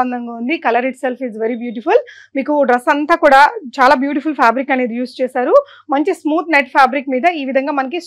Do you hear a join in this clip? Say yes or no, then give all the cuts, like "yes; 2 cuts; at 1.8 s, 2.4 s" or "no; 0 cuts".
no; 0 cuts